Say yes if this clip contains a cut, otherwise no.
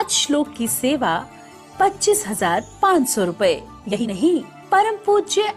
yes